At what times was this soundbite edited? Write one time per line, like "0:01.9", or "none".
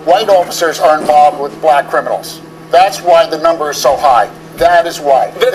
0:02.1
0:04.4